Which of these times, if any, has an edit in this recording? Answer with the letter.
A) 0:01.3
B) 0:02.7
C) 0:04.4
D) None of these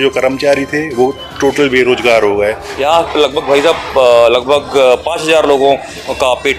B